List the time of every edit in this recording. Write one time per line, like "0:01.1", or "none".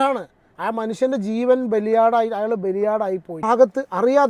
0:03.4